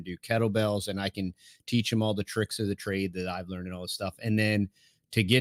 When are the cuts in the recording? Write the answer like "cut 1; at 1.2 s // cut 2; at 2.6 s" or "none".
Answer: none